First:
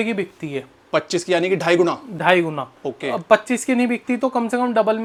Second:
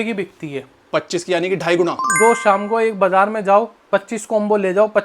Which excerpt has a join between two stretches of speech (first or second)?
second